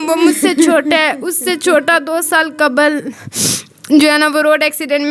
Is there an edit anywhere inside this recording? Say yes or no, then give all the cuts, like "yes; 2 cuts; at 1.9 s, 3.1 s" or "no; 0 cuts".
no; 0 cuts